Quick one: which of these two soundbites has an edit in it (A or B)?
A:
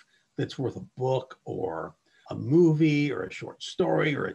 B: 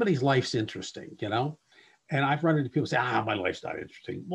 A